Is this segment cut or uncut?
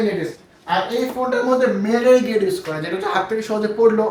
uncut